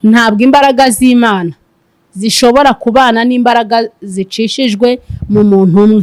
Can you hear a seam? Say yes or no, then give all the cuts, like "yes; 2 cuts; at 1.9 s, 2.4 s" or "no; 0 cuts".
no; 0 cuts